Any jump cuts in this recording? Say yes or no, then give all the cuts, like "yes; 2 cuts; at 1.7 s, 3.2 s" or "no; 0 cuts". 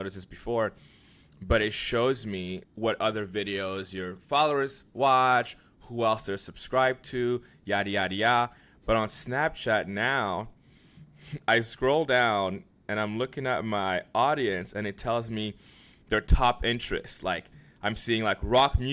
no; 0 cuts